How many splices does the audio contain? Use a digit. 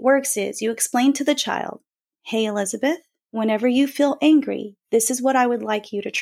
0